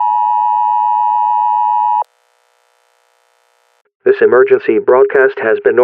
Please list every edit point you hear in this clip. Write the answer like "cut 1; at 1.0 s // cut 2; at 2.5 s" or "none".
cut 1; at 2.0 s